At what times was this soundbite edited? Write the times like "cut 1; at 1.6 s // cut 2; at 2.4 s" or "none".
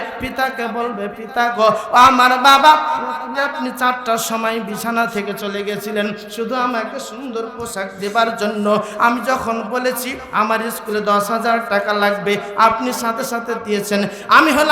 none